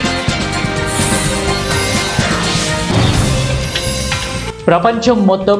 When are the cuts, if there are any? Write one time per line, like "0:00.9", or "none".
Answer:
none